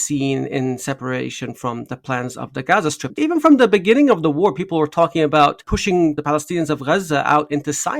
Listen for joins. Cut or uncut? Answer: cut